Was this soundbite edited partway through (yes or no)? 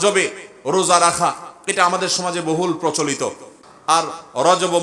yes